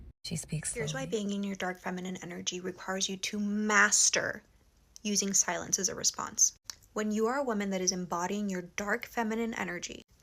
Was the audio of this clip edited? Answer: yes; 1 cut; at 0.9 s

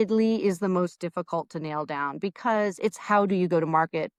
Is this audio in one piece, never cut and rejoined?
yes; 0 cuts

